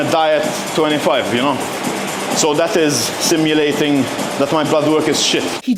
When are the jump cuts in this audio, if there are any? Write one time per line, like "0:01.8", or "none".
none